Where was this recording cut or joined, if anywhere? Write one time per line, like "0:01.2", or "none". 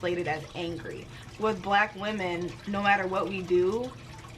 none